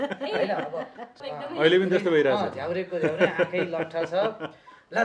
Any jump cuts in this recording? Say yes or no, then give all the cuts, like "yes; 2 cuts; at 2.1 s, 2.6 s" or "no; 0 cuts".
yes; 1 cut; at 1.2 s